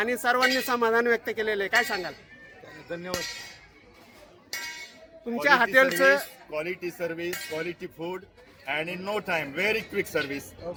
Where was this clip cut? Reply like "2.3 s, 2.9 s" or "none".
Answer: none